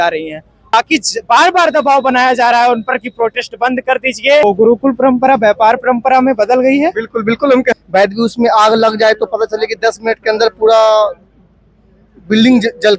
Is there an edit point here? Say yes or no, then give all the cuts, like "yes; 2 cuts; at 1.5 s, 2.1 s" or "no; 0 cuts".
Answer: yes; 3 cuts; at 0.7 s, 4.4 s, 7.8 s